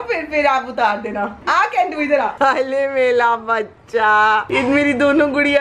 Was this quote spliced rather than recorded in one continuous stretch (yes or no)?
no